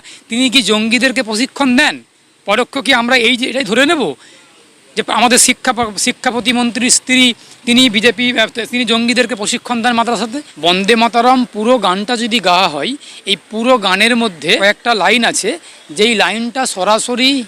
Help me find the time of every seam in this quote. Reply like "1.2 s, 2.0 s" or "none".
10.5 s, 14.6 s